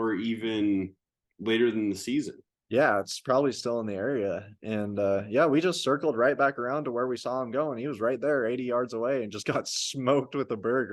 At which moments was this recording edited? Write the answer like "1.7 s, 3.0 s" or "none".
none